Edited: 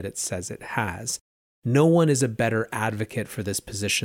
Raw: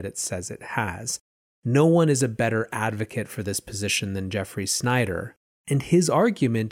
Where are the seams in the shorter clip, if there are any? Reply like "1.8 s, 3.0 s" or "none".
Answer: none